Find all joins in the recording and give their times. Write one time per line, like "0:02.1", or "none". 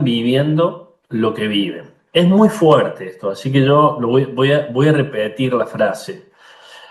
none